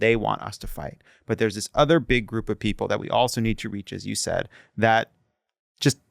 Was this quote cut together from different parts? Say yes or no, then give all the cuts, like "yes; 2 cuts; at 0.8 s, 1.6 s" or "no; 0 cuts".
no; 0 cuts